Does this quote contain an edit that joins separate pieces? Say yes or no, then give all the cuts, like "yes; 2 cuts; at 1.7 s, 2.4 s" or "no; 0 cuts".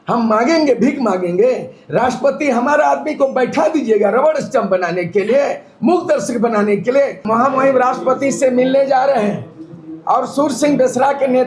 yes; 1 cut; at 7.2 s